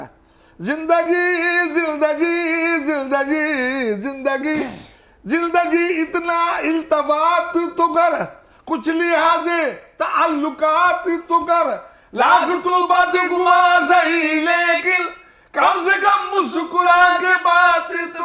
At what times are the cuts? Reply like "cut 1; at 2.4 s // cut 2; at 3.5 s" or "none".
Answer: none

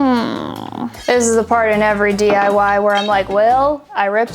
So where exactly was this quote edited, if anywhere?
cut 1; at 0.9 s

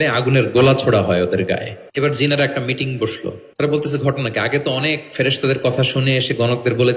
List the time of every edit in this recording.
cut 1; at 1.8 s // cut 2; at 3.2 s

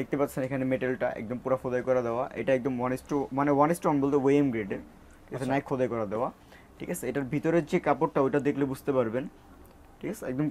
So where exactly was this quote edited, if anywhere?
none

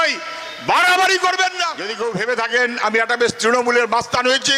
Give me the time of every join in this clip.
cut 1; at 1.8 s

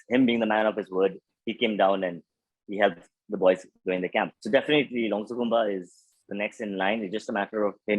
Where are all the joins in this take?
cut 1; at 4.4 s

